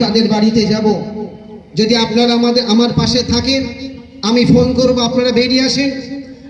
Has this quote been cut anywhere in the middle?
no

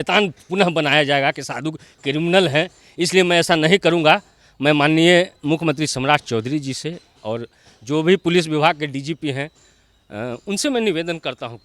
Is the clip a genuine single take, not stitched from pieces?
yes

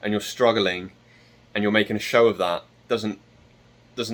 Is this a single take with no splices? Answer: yes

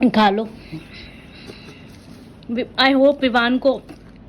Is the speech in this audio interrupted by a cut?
no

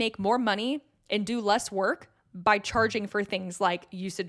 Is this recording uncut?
yes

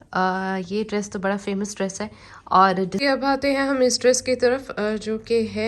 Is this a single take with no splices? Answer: no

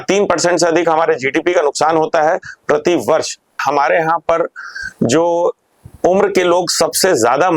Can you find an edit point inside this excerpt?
yes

